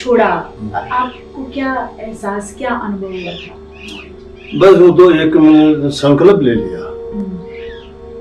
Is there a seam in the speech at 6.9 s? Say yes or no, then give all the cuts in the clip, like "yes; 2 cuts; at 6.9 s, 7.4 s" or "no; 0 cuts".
no; 0 cuts